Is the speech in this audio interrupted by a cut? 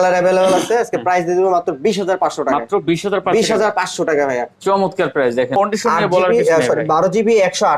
yes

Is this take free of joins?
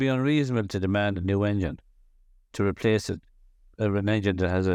yes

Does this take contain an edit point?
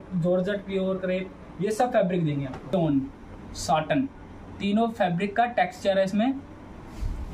yes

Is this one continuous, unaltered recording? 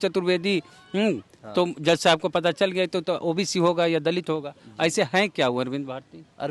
yes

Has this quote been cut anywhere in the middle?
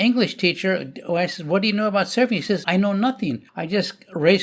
yes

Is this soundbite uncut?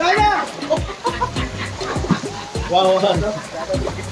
yes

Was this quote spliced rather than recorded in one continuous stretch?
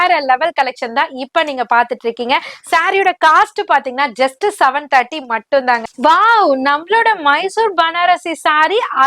yes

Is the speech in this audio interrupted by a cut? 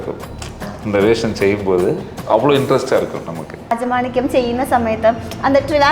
yes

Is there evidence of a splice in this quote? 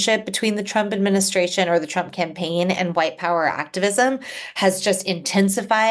no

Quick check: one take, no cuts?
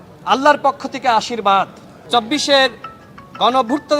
no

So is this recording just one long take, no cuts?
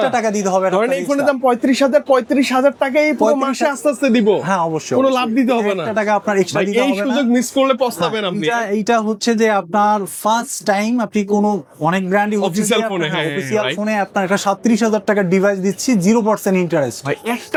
yes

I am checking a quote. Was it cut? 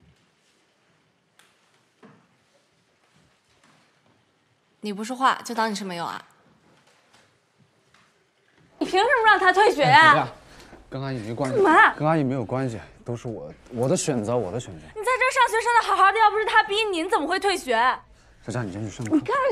yes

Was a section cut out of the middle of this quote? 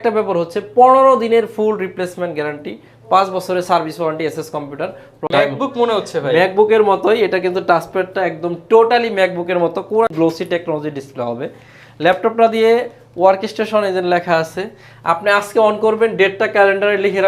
yes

